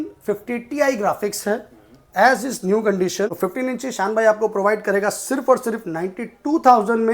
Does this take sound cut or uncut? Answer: cut